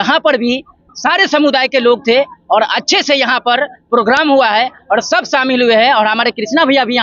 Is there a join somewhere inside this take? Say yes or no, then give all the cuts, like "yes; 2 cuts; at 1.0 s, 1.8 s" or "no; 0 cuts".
no; 0 cuts